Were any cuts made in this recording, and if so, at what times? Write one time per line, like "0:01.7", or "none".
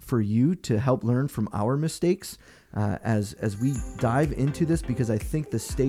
none